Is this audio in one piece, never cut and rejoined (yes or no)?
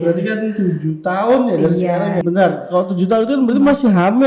no